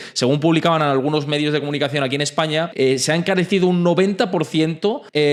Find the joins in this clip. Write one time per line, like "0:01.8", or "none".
none